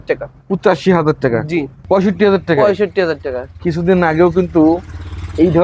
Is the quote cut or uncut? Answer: cut